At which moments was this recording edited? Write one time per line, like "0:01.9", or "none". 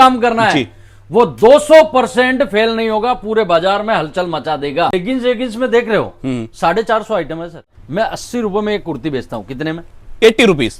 0:04.9
0:07.7